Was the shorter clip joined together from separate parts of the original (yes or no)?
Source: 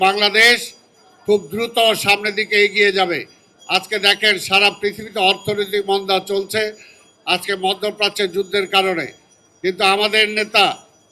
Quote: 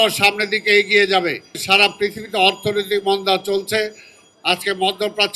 yes